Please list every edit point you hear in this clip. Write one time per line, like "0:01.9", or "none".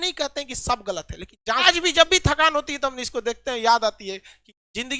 0:01.6